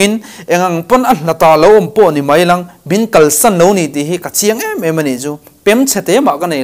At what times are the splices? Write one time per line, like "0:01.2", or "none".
none